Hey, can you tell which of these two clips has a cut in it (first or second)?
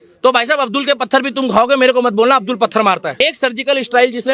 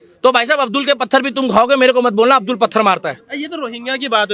first